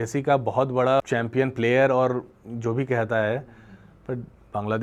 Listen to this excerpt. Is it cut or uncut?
uncut